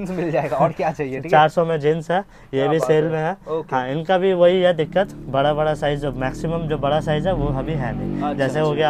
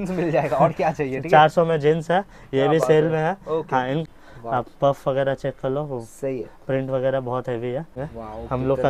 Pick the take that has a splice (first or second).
second